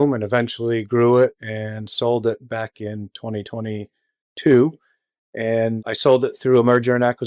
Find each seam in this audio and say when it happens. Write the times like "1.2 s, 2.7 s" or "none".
5.8 s